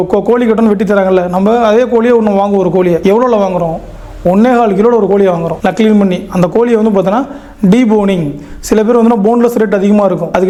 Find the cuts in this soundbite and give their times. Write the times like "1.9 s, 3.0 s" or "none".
none